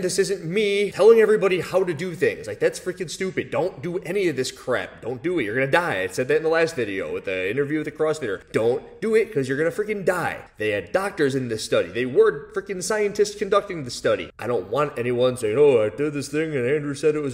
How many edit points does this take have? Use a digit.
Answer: 1